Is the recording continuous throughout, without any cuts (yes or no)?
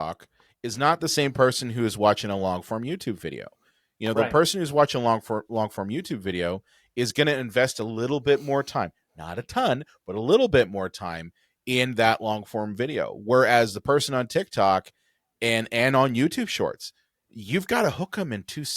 yes